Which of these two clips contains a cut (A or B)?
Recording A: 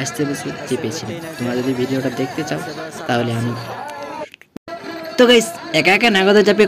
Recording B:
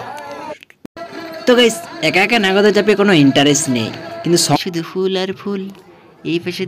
B